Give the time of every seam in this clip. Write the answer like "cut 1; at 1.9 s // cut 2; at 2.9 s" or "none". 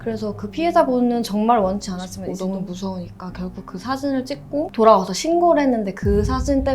cut 1; at 2.2 s